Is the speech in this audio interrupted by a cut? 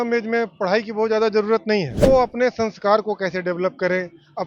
yes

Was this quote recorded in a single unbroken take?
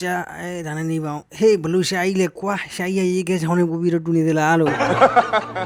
yes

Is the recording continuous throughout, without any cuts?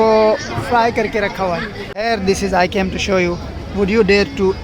no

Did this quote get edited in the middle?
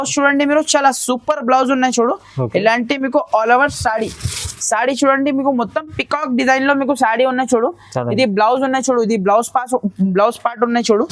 no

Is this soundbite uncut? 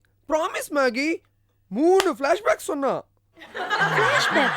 yes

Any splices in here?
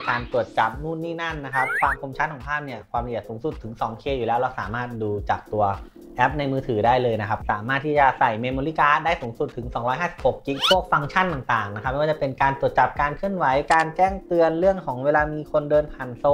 yes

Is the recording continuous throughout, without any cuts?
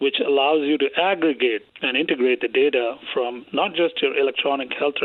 yes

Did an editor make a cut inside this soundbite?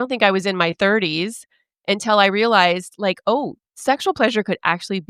no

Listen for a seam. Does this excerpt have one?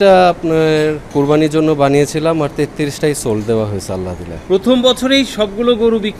yes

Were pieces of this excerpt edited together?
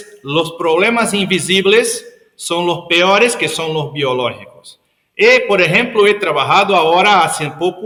no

